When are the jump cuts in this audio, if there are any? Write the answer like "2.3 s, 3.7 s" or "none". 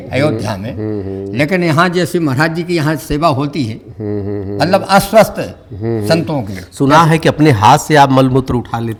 none